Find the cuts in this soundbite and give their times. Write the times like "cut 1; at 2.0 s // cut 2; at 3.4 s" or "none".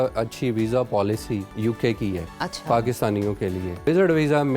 cut 1; at 1.5 s // cut 2; at 2.3 s // cut 3; at 3.9 s